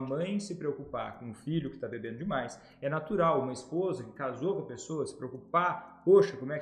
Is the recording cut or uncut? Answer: uncut